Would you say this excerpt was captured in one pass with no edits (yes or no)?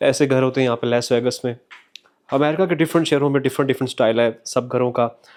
yes